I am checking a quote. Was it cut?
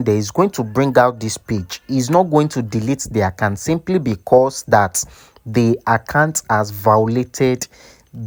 no; 0 cuts

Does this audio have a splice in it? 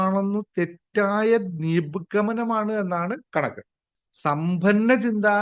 yes; 1 cut; at 3.8 s

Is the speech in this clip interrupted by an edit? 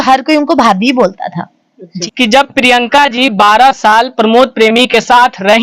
yes; 1 cut; at 1.9 s

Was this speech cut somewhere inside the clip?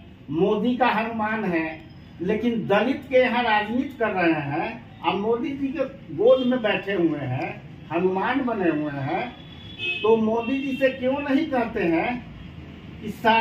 no; 0 cuts

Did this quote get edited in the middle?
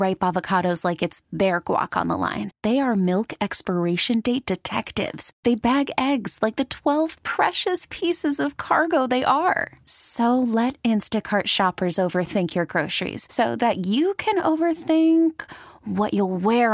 no; 0 cuts

